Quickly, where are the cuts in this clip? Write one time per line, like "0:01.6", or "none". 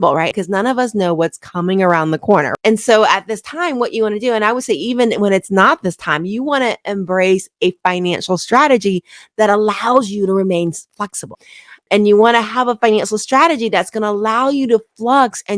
0:02.5
0:11.4